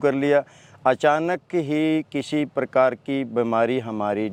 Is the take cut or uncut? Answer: uncut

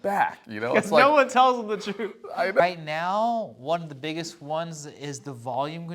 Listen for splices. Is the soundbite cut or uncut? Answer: cut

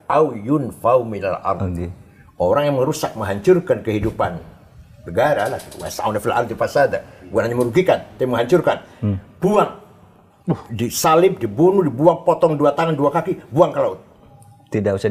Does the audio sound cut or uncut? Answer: uncut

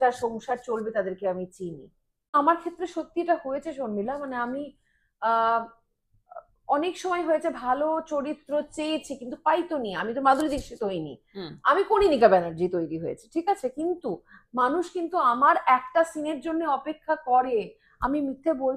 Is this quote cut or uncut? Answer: cut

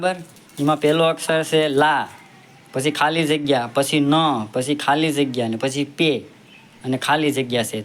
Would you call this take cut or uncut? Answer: uncut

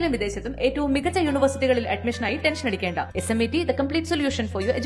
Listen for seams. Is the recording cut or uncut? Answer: uncut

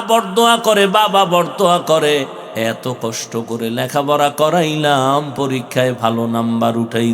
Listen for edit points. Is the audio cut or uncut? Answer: cut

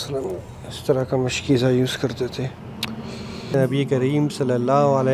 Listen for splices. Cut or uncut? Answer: cut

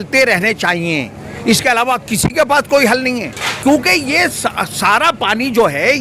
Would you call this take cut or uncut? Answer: cut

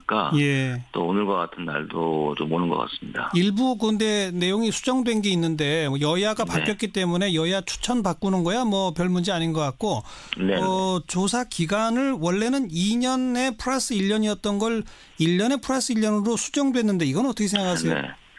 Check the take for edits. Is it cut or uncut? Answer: cut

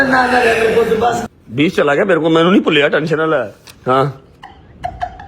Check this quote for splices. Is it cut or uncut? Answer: cut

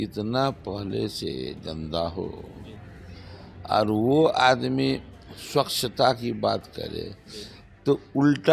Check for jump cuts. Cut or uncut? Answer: uncut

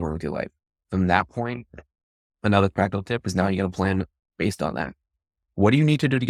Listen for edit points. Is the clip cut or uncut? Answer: uncut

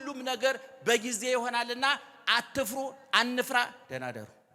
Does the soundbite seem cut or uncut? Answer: uncut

